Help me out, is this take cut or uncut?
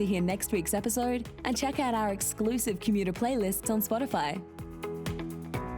cut